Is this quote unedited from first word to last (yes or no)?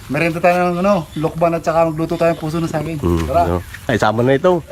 yes